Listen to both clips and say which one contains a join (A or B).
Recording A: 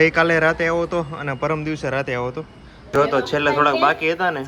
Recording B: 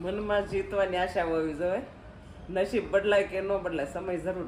A